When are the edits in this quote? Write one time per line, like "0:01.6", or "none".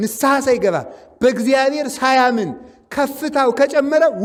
none